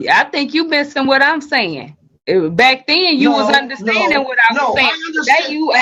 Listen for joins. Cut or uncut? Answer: uncut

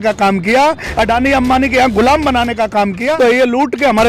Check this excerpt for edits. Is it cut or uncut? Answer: cut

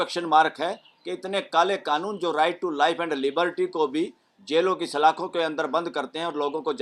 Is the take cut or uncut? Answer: uncut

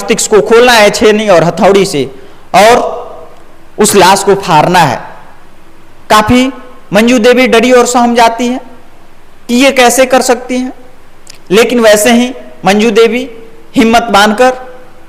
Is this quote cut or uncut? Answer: uncut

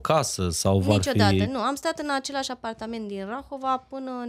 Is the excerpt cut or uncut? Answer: uncut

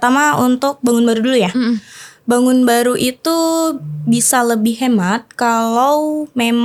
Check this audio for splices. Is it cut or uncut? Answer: uncut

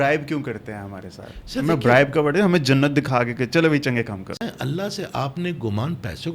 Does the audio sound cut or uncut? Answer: cut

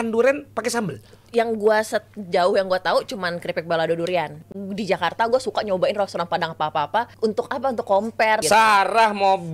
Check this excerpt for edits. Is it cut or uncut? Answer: cut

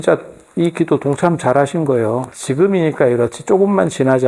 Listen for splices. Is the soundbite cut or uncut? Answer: cut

